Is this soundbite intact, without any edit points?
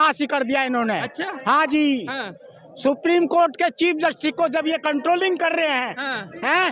yes; 0 cuts

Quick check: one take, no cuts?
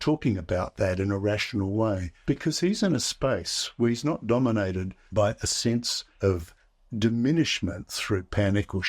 no; 3 cuts; at 2.1 s, 4.9 s, 6.0 s

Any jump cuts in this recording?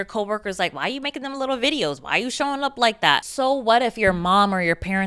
yes; 1 cut; at 3.3 s

